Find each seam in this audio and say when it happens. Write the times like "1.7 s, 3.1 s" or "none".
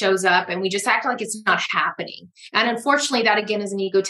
none